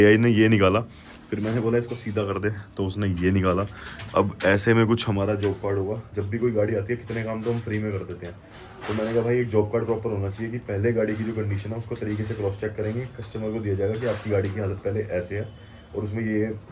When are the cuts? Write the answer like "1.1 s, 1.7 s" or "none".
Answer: none